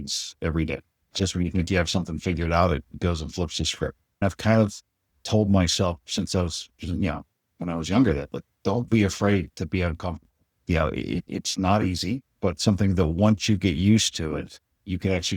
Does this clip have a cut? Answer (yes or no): yes